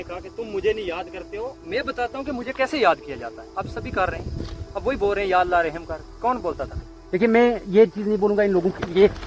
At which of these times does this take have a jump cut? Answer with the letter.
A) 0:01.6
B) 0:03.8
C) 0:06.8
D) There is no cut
C